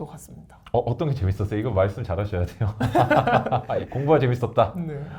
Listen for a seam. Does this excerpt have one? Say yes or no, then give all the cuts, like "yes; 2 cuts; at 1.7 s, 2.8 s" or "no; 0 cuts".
no; 0 cuts